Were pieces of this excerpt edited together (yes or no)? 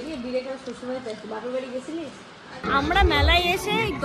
yes